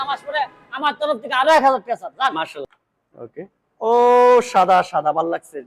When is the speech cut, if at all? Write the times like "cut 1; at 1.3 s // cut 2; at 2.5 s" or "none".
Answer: cut 1; at 2.7 s